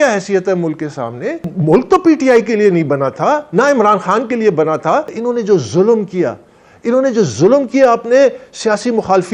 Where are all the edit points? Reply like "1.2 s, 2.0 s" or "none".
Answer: 1.5 s, 5.1 s